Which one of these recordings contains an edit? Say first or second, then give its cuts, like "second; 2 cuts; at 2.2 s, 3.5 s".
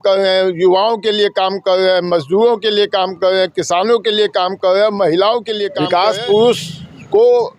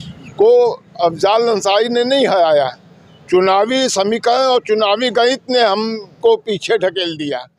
first; 1 cut; at 5.7 s